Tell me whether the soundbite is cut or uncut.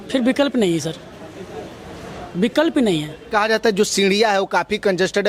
cut